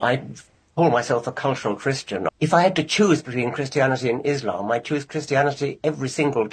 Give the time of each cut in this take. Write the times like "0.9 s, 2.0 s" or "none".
2.3 s